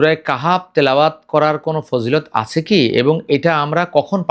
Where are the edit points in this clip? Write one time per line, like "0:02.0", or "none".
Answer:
none